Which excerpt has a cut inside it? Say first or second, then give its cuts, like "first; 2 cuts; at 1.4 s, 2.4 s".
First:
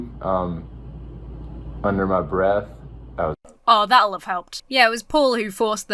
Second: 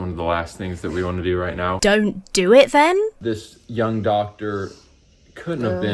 second; 2 cuts; at 1.8 s, 3.2 s